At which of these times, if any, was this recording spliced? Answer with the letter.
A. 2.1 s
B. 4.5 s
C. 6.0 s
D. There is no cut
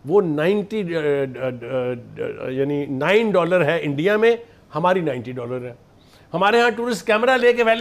D